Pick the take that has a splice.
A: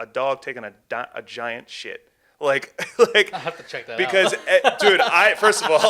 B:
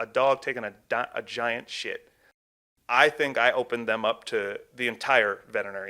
B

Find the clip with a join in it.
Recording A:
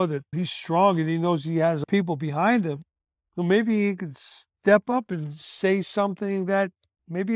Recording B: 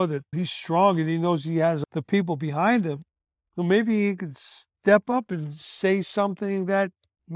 A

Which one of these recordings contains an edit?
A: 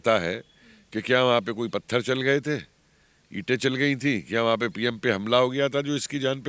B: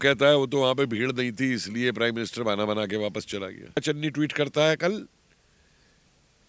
B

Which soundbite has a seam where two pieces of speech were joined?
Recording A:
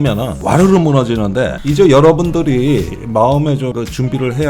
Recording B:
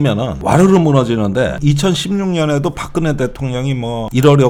A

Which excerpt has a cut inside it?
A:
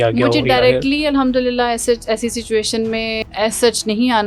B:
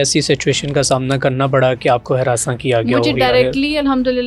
A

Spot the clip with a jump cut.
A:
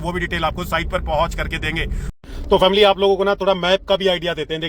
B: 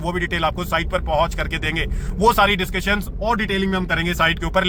A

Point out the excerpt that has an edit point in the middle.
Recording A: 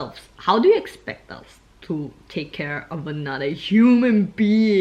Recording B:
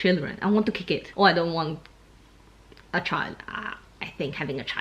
B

